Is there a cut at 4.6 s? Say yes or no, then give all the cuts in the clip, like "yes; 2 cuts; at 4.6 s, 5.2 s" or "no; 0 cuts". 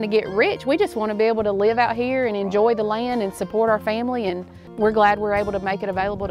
yes; 1 cut; at 4.6 s